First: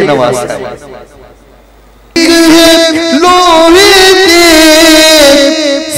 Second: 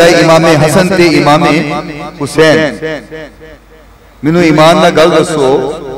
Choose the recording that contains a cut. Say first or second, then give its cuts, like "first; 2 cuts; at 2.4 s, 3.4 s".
first; 1 cut; at 2.2 s